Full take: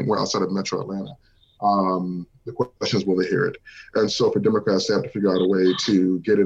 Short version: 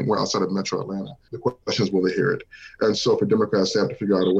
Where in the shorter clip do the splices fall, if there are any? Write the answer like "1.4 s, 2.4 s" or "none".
1.2 s